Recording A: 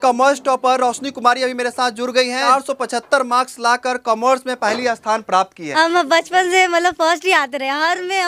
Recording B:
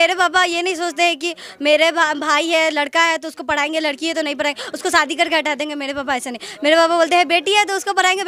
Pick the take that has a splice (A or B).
A